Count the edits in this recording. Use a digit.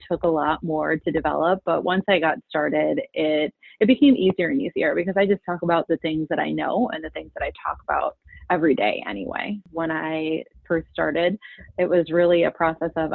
1